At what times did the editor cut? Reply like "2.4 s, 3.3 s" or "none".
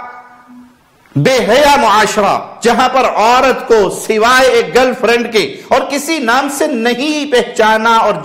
none

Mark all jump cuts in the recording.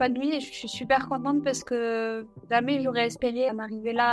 none

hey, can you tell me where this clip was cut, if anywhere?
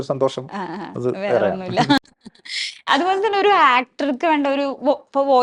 none

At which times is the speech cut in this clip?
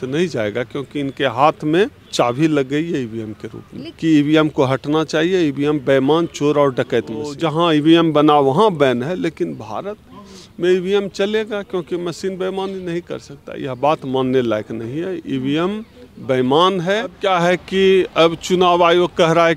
2.0 s, 3.8 s, 7.3 s, 17.1 s

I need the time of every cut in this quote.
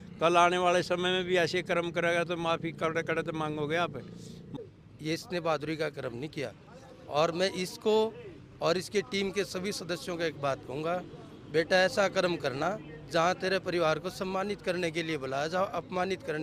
4.4 s

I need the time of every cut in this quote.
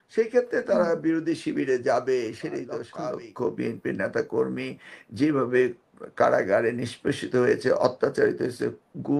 2.9 s

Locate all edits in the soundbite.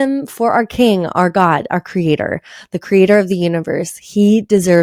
none

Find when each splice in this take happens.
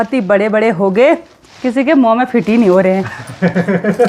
none

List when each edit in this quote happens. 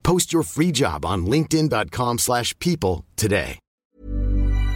3.7 s

